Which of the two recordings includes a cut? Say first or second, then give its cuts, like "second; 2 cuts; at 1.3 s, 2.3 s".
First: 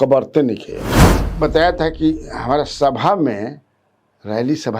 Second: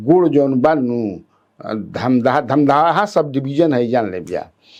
first; 1 cut; at 1.2 s